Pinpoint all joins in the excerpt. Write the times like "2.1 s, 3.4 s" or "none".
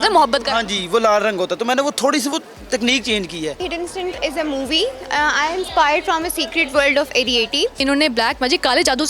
3.6 s, 7.8 s